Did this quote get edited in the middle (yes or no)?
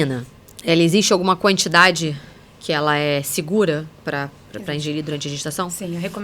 no